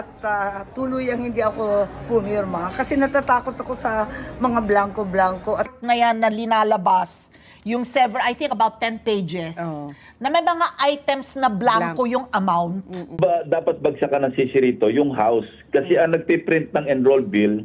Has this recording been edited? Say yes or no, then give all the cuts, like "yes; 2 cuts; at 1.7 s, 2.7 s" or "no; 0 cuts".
yes; 2 cuts; at 5.7 s, 13.2 s